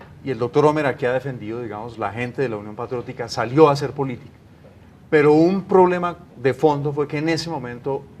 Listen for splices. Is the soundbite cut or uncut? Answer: cut